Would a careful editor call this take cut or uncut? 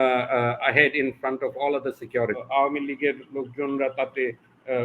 cut